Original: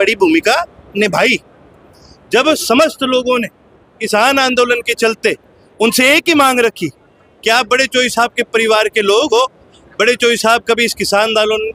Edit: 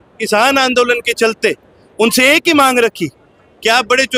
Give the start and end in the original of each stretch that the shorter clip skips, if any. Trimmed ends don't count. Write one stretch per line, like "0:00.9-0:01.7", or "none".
none